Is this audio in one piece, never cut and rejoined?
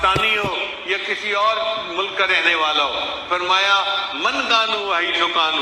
yes; 0 cuts

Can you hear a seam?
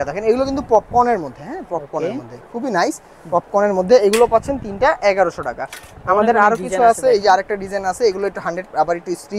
no; 0 cuts

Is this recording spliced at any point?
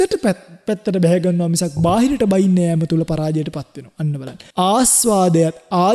yes; 1 cut; at 4.3 s

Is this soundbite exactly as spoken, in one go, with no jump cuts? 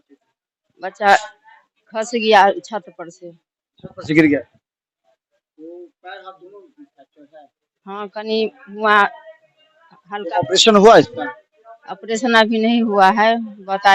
yes; 0 cuts

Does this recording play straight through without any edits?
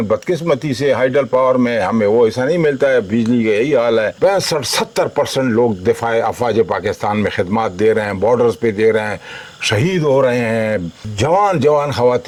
yes; 0 cuts

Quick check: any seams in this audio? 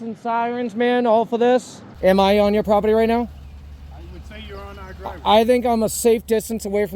yes; 1 cut; at 1.8 s

